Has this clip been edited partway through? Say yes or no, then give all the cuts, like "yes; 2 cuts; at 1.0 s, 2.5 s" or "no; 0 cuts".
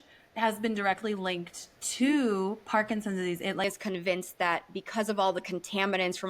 yes; 1 cut; at 3.6 s